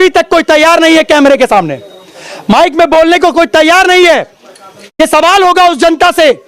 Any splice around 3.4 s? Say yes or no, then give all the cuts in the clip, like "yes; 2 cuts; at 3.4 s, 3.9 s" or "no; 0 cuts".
no; 1 cut; at 5.0 s